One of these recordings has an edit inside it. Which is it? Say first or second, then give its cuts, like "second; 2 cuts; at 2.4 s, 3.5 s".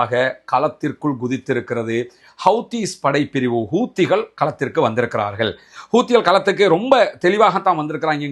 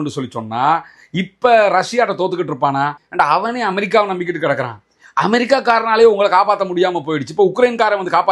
second; 1 cut; at 3.0 s